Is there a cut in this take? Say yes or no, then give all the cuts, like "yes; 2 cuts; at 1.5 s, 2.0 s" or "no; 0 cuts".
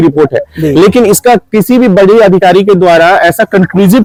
no; 0 cuts